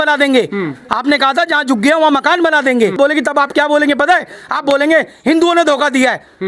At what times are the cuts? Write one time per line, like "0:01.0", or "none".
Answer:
0:02.9